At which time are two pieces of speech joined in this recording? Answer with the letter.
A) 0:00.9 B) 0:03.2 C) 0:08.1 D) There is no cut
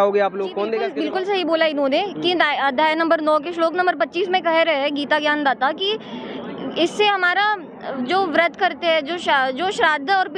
A